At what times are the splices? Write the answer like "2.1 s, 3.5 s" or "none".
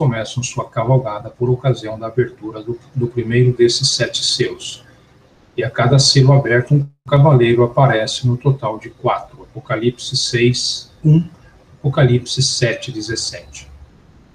1.4 s